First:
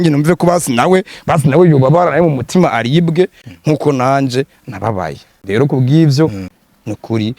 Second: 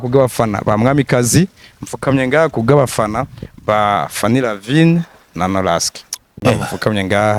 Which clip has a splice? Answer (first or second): first